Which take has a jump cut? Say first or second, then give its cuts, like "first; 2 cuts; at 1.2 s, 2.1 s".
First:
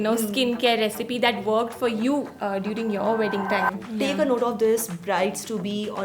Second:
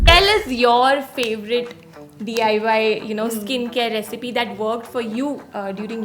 first; 1 cut; at 3.8 s